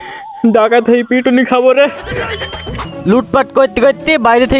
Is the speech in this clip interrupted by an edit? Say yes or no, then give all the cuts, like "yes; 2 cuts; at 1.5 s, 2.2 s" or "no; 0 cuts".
yes; 1 cut; at 2.9 s